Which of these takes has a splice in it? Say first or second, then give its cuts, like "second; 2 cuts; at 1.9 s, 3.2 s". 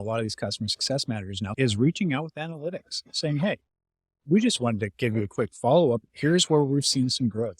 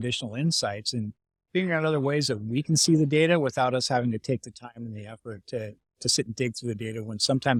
first; 1 cut; at 1.5 s